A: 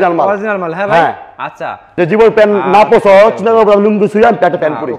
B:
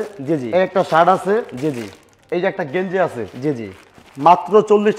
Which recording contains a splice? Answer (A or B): A